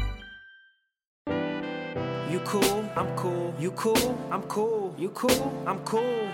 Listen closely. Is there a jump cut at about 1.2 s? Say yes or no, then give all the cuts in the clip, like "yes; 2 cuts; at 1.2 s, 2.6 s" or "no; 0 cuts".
yes; 1 cut; at 1.2 s